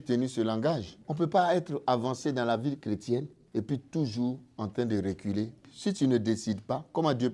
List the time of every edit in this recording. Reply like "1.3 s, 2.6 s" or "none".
1.0 s, 3.4 s, 5.7 s